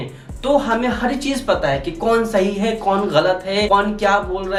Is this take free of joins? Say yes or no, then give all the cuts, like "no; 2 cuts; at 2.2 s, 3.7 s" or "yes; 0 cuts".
yes; 0 cuts